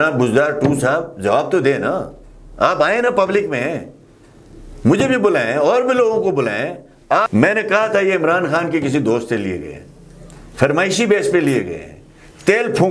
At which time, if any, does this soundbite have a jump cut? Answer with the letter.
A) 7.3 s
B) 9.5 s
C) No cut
A